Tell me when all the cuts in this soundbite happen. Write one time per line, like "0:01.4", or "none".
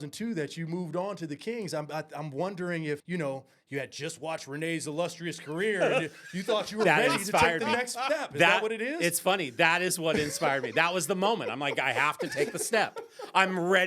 0:03.0